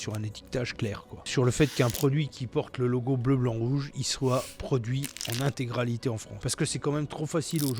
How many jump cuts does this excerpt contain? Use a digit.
2